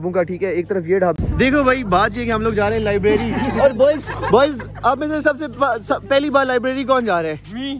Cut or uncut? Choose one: cut